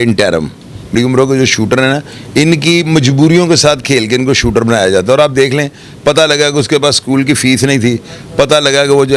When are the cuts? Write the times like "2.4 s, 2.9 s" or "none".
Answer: 0.9 s